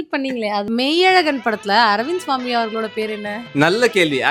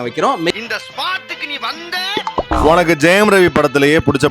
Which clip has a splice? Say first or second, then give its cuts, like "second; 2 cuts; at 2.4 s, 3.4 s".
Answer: second; 1 cut; at 2.5 s